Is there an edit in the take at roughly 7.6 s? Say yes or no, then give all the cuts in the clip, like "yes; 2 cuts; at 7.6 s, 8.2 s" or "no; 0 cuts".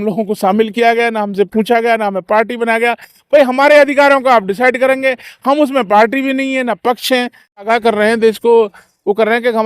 yes; 1 cut; at 7.6 s